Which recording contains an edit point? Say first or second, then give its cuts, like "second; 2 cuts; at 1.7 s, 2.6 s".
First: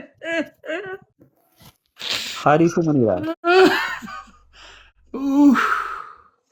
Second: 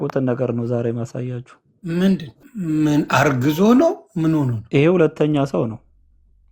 second; 2 cuts; at 2.4 s, 4.6 s